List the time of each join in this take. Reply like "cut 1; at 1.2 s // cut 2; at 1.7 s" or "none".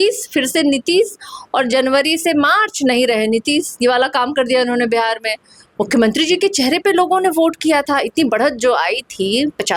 none

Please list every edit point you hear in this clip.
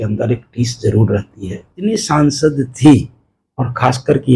cut 1; at 1.9 s

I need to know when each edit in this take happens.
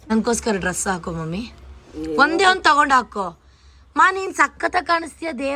none

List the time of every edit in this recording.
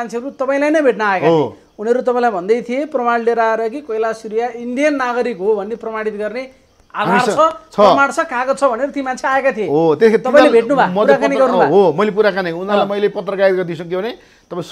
none

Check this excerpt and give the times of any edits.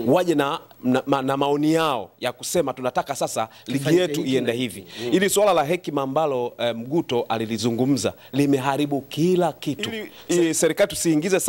cut 1; at 10.1 s

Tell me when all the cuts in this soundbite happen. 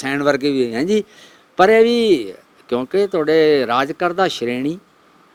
none

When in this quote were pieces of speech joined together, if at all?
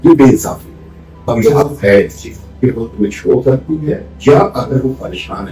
cut 1; at 1.2 s

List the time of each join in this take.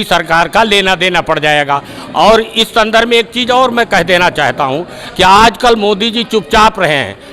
none

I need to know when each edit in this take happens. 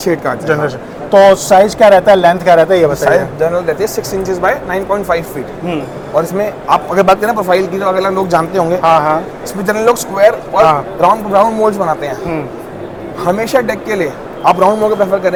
none

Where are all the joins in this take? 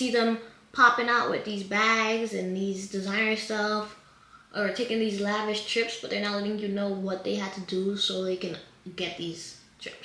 none

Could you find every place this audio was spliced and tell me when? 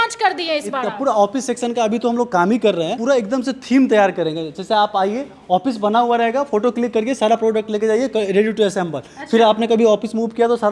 none

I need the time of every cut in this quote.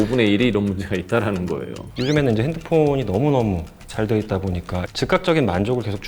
cut 1; at 1.9 s // cut 2; at 4.9 s

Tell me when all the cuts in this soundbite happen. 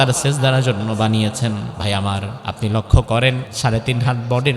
cut 1; at 1.7 s // cut 2; at 2.3 s // cut 3; at 3.5 s

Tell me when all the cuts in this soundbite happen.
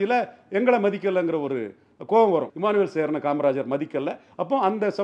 cut 1; at 2.5 s

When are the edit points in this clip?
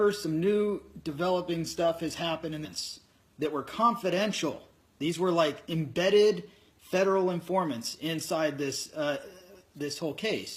none

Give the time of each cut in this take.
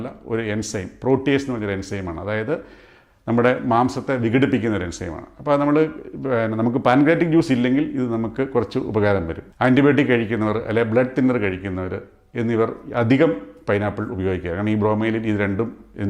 cut 1; at 9.4 s

